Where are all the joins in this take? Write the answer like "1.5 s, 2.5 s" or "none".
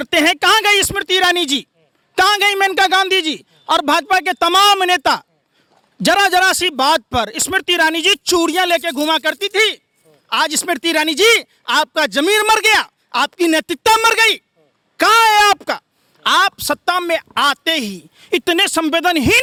none